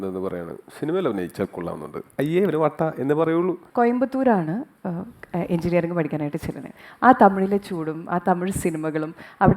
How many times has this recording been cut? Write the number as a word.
zero